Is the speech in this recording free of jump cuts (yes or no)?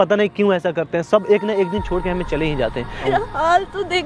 no